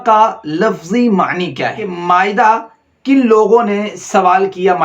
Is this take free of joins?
no; 1 cut; at 2.0 s

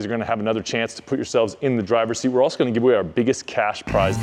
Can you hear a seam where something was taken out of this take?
no; 0 cuts

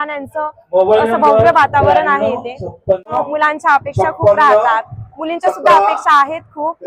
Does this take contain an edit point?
no; 0 cuts

